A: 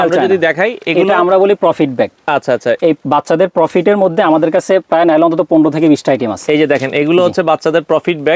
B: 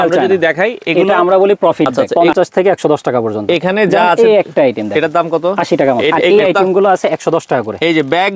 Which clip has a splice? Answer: B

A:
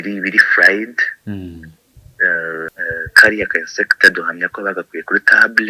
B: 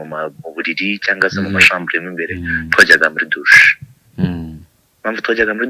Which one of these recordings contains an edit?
A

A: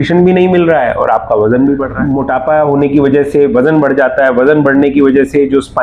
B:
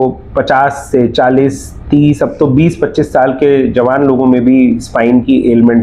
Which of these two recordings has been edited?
A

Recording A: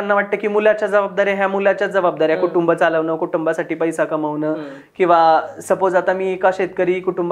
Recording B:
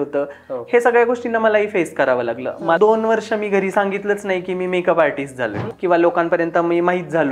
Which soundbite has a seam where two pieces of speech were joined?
B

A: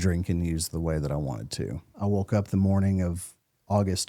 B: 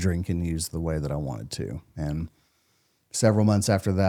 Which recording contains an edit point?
A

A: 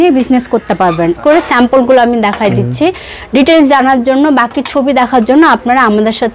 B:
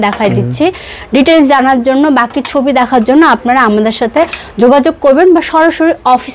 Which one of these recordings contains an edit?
A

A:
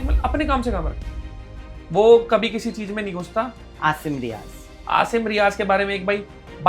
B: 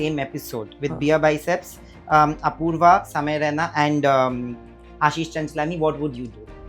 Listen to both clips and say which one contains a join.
A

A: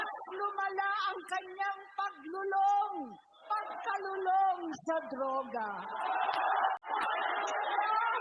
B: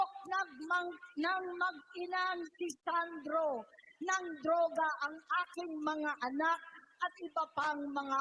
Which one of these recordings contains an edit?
A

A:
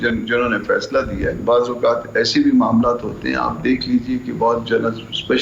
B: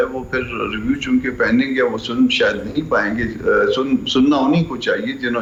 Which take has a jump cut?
A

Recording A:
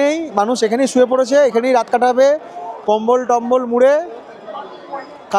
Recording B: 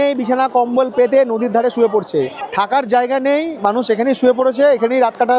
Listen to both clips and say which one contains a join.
B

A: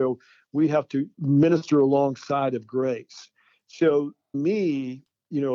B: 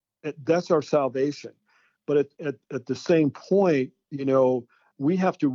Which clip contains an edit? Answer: A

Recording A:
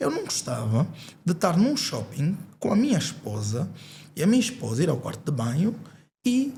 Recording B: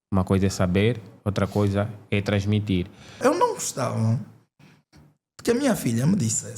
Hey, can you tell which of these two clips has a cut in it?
B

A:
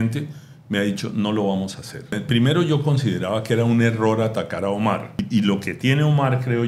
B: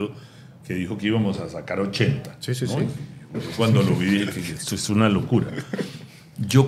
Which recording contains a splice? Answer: A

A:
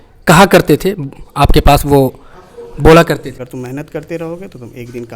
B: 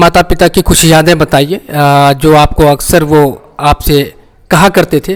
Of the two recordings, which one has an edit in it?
A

